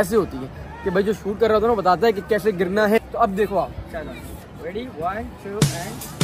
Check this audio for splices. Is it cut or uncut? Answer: uncut